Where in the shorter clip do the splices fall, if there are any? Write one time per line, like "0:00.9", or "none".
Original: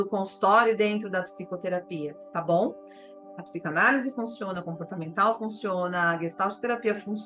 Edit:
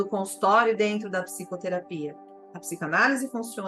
0:02.2